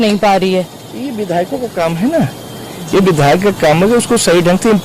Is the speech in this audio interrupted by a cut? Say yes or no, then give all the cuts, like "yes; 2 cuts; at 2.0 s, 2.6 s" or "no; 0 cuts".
no; 0 cuts